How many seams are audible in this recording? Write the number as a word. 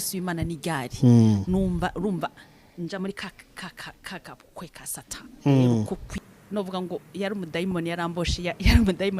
one